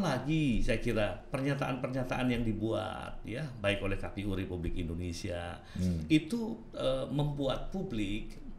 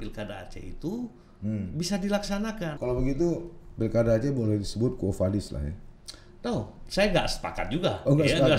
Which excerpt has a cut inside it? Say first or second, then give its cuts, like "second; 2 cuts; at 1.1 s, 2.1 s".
second; 1 cut; at 2.7 s